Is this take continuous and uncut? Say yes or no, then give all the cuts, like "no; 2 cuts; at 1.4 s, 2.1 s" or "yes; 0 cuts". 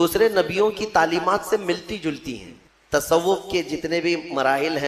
no; 1 cut; at 2.6 s